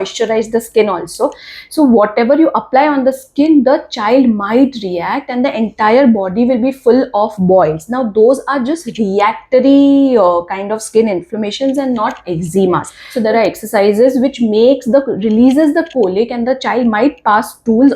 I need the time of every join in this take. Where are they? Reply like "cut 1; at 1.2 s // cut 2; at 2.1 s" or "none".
cut 1; at 13.0 s